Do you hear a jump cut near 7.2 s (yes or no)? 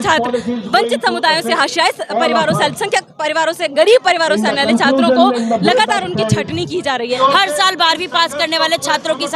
yes